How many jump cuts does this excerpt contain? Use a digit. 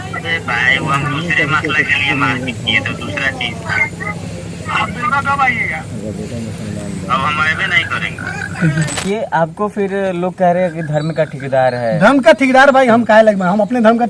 1